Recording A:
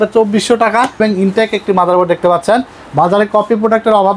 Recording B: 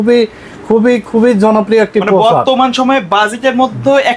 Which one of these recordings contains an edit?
A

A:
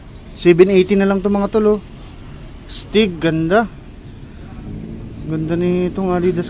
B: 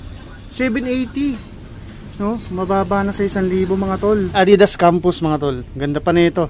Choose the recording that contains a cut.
B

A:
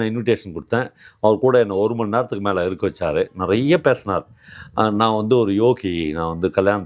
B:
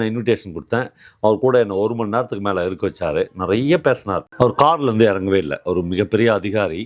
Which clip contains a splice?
B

